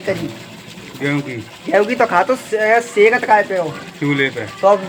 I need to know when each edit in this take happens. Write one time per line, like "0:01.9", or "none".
none